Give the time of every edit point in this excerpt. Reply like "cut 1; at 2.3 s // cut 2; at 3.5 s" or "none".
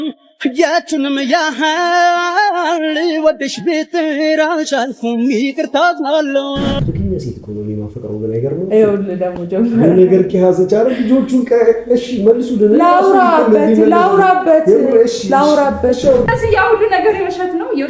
cut 1; at 6.8 s // cut 2; at 16.3 s